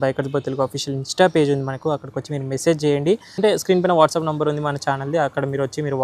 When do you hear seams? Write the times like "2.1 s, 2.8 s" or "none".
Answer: 3.4 s

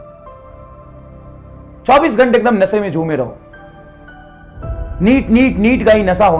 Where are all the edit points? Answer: none

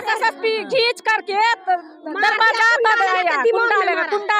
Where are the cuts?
none

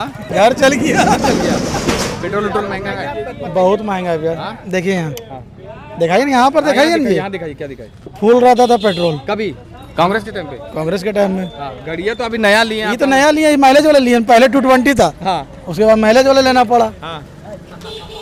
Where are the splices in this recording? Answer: none

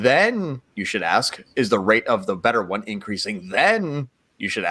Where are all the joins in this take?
none

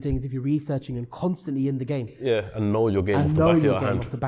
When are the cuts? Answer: none

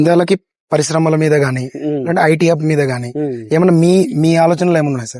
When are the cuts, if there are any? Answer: none

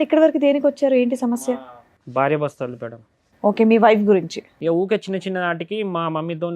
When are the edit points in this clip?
4.4 s

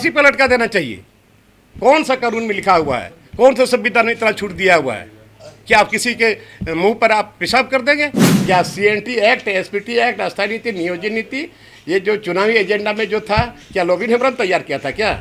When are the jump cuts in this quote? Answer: 8.3 s

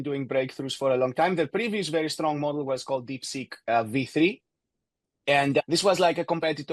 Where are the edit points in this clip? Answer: none

